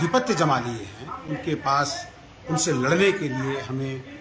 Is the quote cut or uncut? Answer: uncut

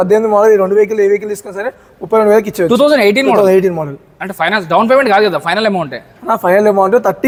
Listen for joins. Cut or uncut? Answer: uncut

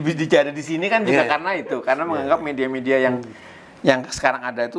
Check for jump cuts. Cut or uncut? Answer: uncut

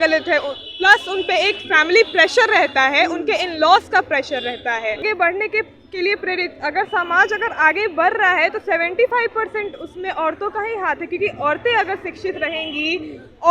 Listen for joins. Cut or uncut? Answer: cut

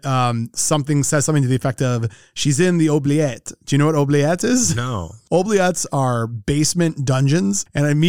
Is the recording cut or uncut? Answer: cut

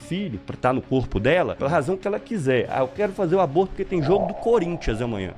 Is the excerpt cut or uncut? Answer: cut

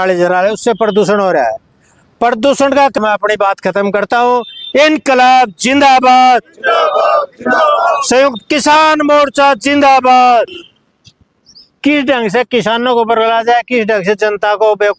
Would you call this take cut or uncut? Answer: cut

